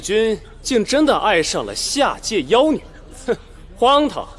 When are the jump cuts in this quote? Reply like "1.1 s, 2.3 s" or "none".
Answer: none